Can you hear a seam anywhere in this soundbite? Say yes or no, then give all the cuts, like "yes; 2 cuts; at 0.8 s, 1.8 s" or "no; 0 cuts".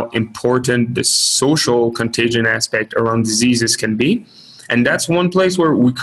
no; 0 cuts